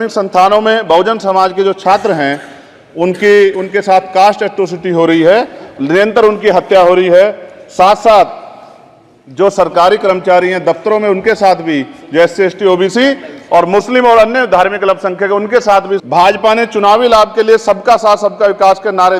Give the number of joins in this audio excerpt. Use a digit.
1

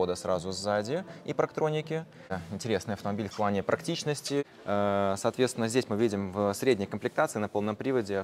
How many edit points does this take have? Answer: 1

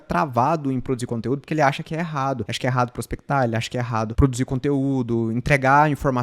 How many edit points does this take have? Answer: 1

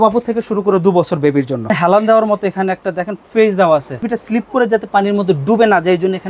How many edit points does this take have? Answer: 2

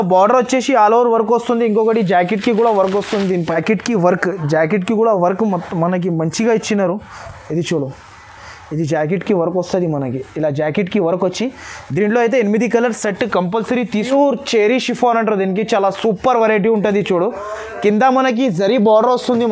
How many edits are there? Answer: 2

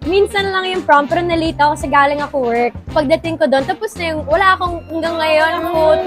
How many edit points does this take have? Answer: 0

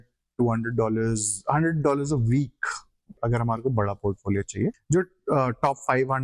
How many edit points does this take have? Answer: 2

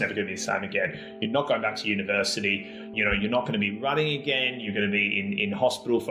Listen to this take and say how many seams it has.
1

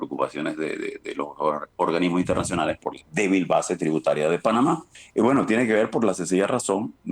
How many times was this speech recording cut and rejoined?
1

